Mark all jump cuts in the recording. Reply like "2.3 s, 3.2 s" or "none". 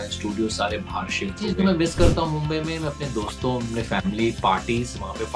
1.4 s